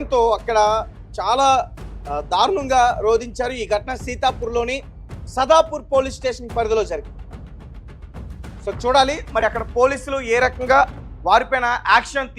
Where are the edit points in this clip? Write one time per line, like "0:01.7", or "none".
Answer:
0:04.6